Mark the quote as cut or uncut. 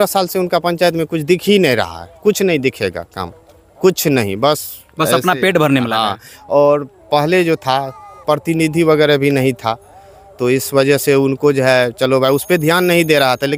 uncut